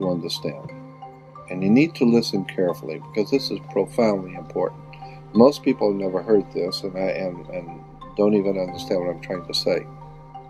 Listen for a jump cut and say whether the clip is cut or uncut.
uncut